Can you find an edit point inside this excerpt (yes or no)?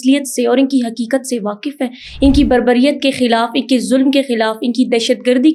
no